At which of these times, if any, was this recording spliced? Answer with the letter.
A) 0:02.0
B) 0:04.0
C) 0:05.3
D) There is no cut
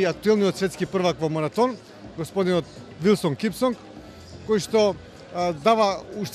D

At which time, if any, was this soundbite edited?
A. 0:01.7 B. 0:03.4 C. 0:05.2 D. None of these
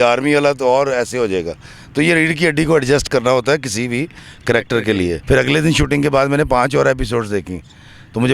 C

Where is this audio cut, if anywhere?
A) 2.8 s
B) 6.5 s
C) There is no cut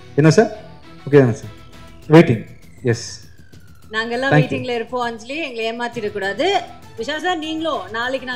C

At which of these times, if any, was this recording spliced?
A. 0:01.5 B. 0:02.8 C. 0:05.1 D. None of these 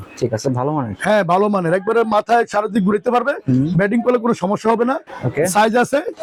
D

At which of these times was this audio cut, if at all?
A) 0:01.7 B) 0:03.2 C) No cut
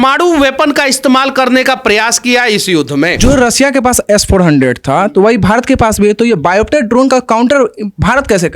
B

